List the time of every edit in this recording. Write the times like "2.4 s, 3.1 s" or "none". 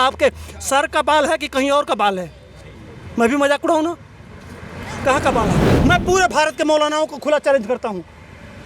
5.6 s